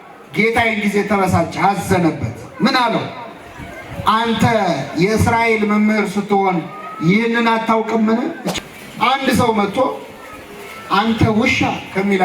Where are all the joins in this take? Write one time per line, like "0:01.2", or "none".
0:08.4